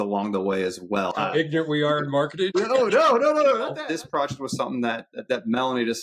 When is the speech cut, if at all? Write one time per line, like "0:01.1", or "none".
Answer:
0:01.1
0:02.5
0:03.8